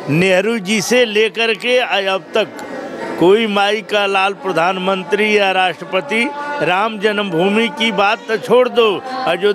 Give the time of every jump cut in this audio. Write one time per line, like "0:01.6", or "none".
none